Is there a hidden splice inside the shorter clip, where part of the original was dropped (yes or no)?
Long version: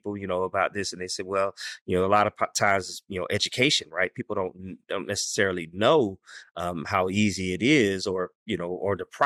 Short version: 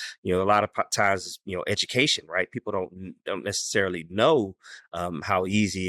no